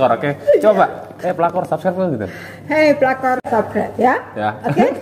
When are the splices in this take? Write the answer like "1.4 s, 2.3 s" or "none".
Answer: 3.5 s